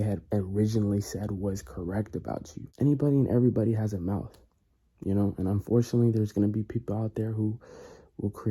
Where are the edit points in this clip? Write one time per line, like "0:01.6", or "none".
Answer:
0:02.6